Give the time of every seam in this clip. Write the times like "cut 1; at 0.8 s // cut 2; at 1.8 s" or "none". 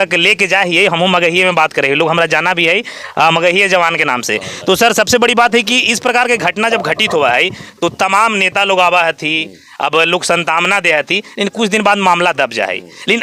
none

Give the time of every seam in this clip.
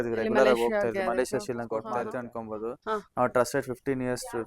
cut 1; at 2.0 s

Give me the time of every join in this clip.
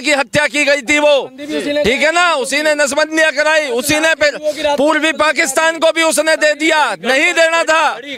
none

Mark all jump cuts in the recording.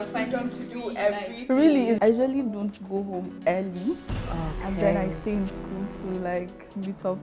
cut 1; at 2.0 s

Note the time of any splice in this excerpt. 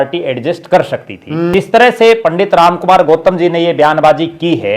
cut 1; at 1.5 s

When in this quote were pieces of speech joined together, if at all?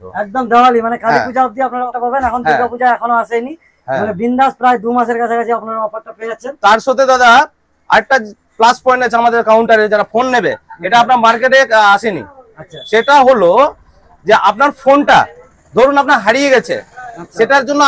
none

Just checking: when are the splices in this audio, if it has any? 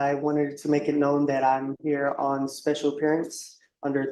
none

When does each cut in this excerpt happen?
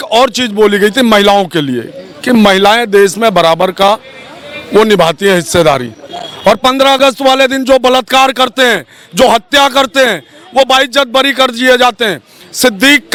none

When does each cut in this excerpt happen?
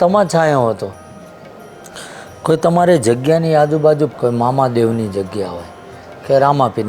cut 1; at 1.2 s

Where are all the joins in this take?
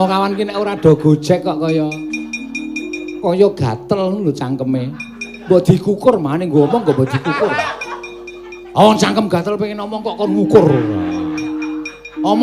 none

